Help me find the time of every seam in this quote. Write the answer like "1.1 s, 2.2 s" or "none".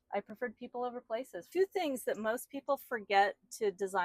1.5 s